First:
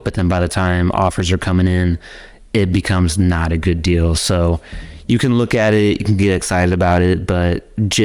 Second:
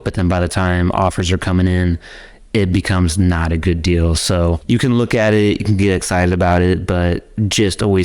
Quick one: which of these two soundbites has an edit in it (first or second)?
second